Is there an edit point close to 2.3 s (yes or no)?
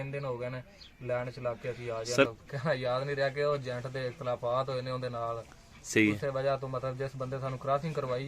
yes